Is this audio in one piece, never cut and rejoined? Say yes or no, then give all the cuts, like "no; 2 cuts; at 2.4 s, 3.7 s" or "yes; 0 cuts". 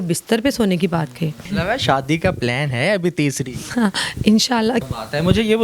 no; 2 cuts; at 1.4 s, 4.8 s